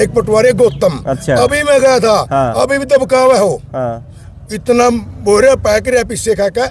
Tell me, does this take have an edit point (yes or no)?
no